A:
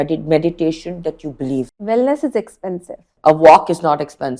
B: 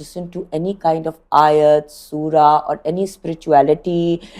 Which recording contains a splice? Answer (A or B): A